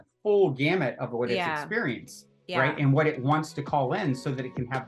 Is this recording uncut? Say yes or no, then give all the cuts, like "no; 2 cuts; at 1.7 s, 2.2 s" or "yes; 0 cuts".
yes; 0 cuts